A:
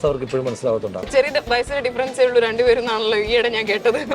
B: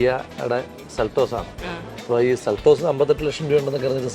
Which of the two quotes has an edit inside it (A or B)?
A